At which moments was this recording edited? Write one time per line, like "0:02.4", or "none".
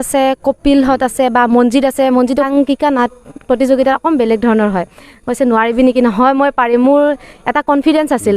0:02.3

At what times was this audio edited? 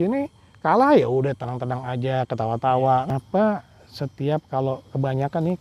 0:03.1

